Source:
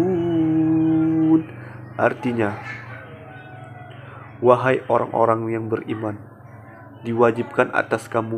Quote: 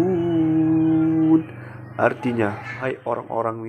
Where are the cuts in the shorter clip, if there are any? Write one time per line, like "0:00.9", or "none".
0:02.8